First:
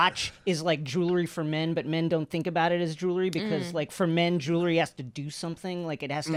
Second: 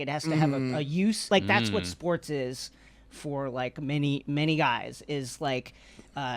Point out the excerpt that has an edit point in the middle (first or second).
second